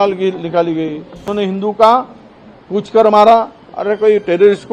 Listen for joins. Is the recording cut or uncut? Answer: cut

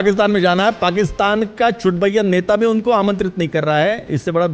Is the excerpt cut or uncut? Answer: uncut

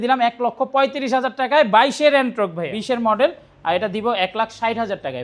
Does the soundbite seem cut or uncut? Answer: cut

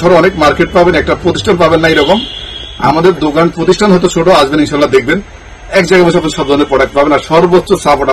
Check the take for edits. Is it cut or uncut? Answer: uncut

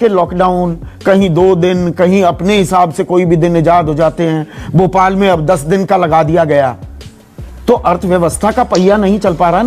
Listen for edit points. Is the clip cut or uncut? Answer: uncut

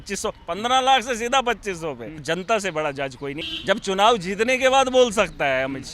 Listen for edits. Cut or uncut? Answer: cut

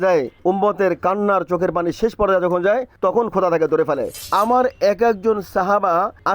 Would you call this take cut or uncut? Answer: cut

